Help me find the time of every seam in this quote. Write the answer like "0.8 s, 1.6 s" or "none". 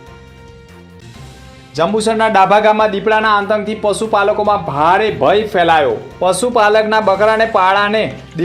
0.9 s